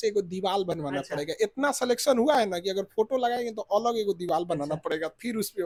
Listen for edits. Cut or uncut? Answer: uncut